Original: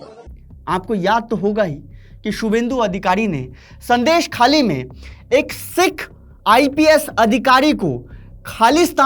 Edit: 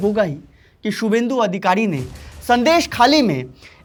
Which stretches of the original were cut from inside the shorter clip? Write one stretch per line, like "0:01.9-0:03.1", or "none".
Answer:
none